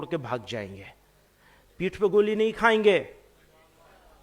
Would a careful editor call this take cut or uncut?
uncut